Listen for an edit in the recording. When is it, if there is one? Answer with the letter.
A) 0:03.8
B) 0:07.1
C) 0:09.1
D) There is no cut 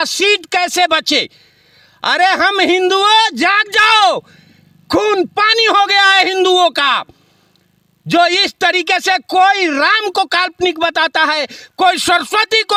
D